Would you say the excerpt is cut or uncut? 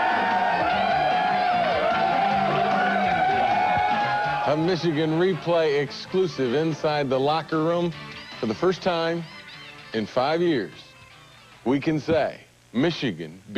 uncut